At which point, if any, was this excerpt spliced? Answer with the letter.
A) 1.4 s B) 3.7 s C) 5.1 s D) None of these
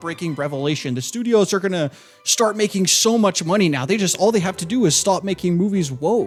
D